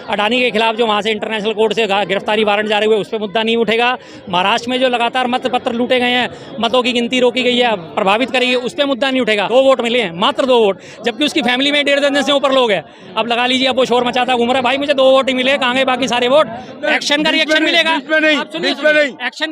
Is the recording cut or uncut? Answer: cut